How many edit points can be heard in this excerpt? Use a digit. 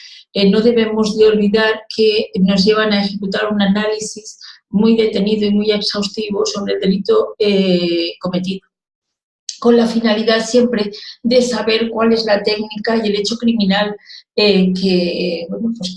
1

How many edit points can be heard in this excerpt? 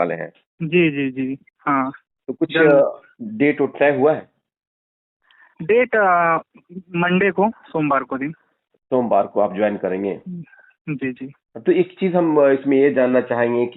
0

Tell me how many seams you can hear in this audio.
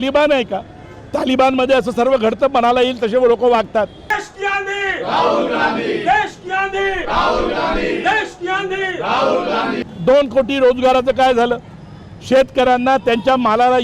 2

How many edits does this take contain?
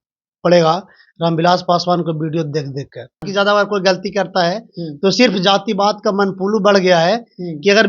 1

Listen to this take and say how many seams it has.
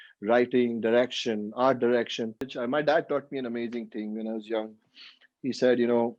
1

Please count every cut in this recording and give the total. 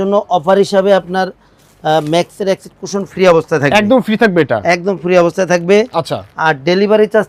0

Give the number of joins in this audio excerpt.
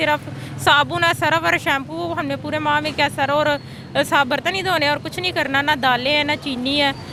0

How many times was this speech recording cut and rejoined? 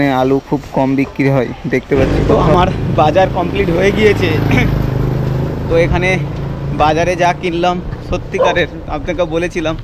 1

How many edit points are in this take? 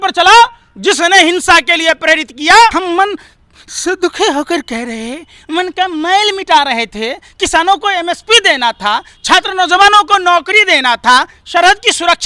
1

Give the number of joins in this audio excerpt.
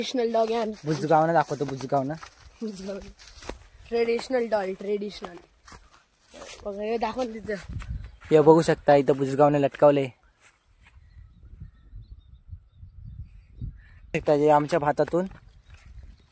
1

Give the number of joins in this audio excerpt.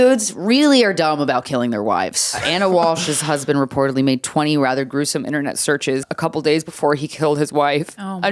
2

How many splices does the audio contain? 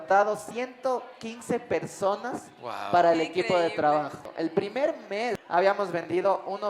2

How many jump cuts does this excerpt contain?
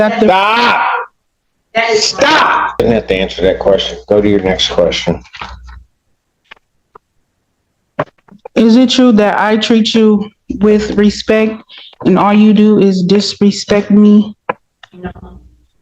1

